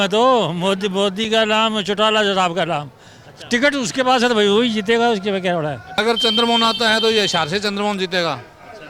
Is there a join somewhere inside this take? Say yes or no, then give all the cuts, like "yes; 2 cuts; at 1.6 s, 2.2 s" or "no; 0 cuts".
yes; 1 cut; at 5.8 s